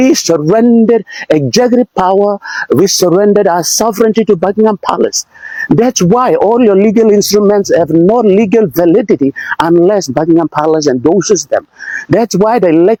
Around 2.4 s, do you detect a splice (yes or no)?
no